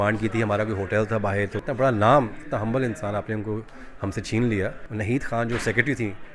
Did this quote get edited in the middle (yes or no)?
yes